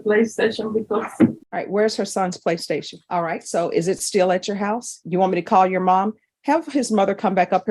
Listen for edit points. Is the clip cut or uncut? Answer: cut